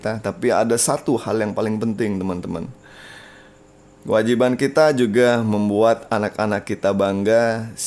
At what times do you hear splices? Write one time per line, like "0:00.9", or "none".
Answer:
none